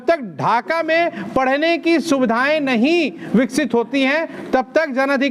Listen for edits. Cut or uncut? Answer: uncut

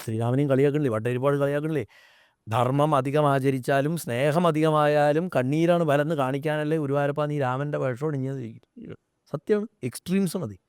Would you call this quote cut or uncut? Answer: uncut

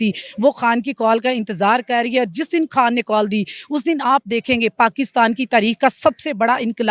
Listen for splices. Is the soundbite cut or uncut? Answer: uncut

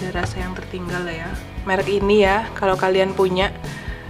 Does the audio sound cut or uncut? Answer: cut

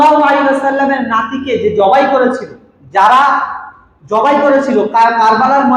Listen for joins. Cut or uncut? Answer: uncut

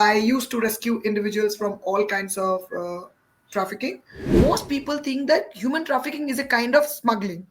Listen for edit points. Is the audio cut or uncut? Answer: cut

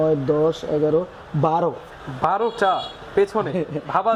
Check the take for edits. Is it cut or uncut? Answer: uncut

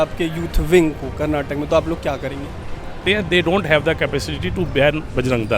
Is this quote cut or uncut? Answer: cut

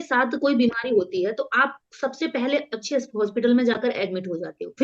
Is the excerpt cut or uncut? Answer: uncut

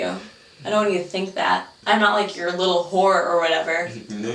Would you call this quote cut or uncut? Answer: cut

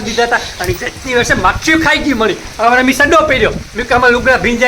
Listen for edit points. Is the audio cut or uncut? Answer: uncut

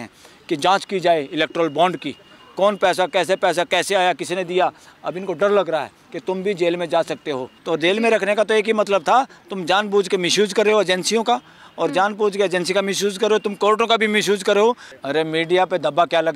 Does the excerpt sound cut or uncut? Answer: cut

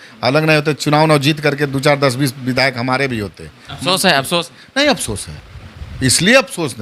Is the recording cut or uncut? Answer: uncut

